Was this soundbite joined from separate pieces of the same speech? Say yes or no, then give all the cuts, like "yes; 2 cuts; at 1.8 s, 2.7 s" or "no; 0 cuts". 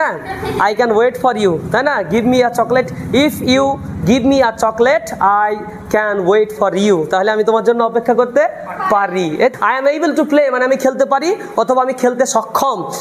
yes; 1 cut; at 9.5 s